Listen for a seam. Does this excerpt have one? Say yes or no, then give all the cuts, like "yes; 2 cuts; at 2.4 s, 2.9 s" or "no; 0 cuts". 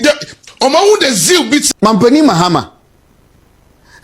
yes; 1 cut; at 1.7 s